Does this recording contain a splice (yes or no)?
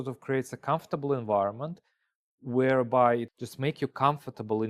yes